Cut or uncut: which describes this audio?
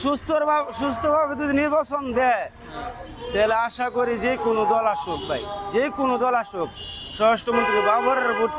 uncut